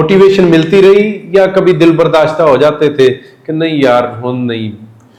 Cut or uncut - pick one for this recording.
uncut